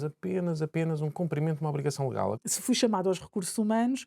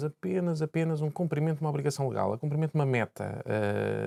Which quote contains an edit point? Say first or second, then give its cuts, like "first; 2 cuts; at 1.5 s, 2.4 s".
first; 1 cut; at 2.4 s